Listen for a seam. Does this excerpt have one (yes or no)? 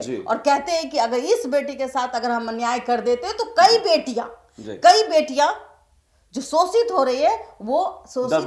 no